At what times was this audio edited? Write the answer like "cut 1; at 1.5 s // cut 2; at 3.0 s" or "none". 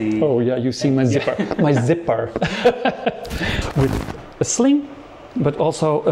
cut 1; at 3.5 s